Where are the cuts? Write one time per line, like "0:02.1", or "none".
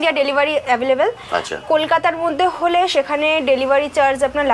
none